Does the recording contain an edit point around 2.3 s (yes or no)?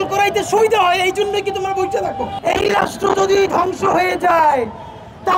yes